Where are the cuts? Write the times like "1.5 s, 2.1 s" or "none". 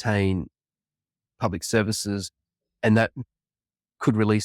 none